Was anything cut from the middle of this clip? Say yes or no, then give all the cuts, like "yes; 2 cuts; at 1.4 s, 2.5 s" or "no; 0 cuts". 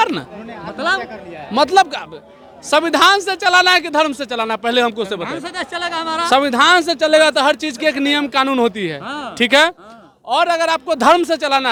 no; 0 cuts